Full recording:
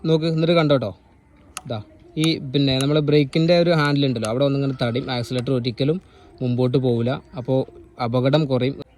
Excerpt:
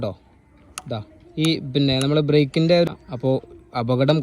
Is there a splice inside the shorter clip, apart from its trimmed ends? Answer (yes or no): yes